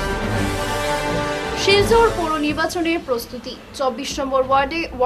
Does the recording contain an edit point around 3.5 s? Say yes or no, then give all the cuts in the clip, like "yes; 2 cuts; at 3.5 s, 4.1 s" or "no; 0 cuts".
no; 1 cut; at 1.4 s